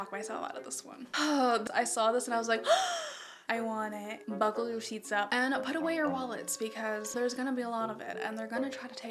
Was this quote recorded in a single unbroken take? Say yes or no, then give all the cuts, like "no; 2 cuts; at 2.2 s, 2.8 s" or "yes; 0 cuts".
no; 3 cuts; at 1.0 s, 1.6 s, 4.2 s